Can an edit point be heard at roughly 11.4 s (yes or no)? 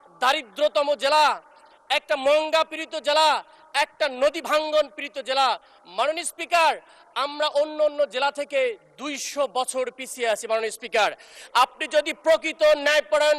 yes